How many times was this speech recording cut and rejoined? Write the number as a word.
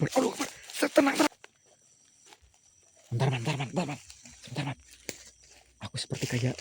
one